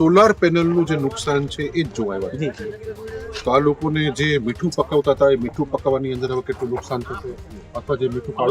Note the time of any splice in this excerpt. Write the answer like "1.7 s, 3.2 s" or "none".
none